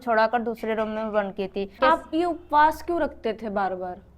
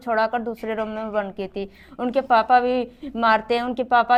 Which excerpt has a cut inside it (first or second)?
first